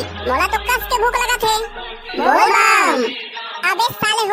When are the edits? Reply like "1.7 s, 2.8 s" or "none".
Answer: none